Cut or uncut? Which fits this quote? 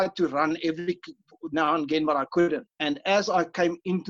cut